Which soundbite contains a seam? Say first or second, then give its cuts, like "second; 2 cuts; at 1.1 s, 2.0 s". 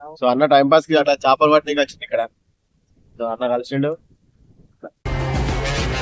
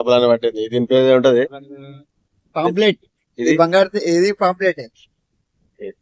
first; 1 cut; at 5.1 s